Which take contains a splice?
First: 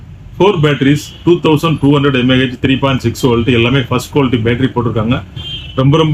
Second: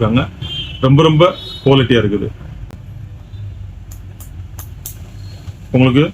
second; 1 cut; at 2.6 s

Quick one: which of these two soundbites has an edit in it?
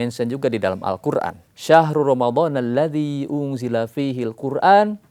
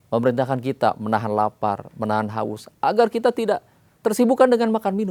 first; 1 cut; at 1.5 s

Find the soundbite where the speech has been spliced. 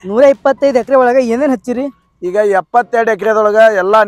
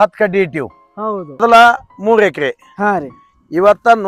second; 1 cut; at 1.4 s

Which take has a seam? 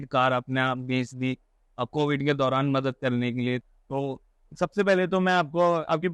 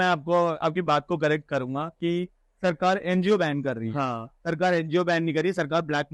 first; 1 cut; at 3.7 s

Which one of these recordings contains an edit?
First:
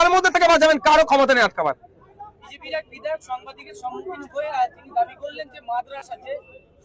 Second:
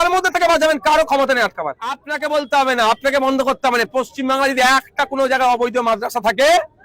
second; 1 cut; at 2.1 s

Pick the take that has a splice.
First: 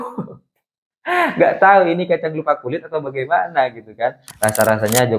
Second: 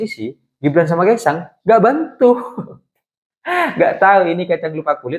first; 1 cut; at 4.3 s

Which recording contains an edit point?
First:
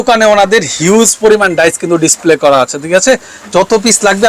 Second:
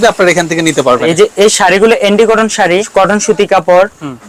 second; 2 cuts; at 1.1 s, 2.9 s

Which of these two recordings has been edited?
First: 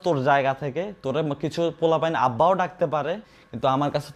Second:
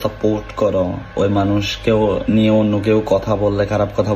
second; 1 cut; at 1.0 s

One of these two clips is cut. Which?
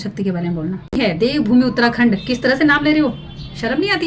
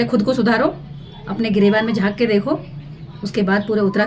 first; 1 cut; at 0.9 s

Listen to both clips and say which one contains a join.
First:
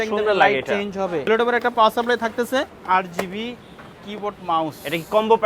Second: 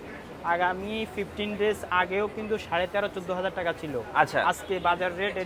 first; 2 cuts; at 1.3 s, 2.8 s

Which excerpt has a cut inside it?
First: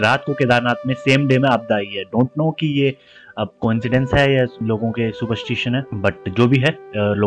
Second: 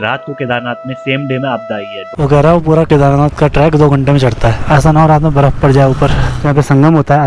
second; 3 cuts; at 2.1 s, 4.6 s, 6.4 s

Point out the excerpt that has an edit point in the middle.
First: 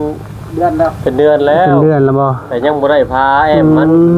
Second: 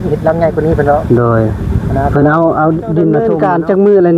second; 1 cut; at 3.3 s

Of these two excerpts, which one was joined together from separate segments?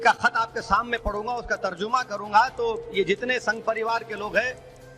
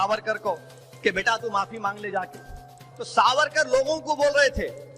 second; 1 cut; at 2.8 s

